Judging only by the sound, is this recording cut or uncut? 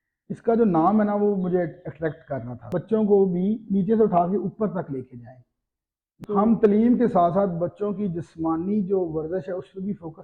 cut